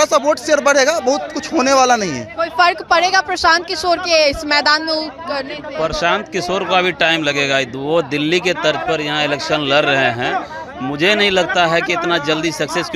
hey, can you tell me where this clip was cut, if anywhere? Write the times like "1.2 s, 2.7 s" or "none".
none